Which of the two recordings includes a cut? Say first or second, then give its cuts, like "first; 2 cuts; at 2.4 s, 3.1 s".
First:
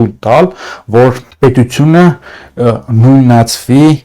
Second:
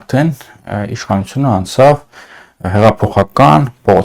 first; 1 cut; at 1.3 s